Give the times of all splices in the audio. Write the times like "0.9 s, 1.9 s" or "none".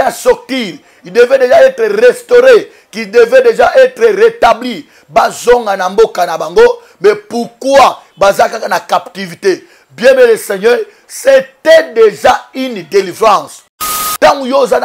13.9 s